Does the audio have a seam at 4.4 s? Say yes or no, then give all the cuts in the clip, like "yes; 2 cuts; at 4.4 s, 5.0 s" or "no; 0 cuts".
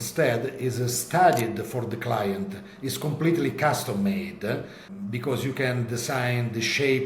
no; 0 cuts